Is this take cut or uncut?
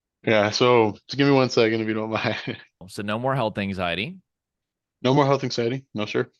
cut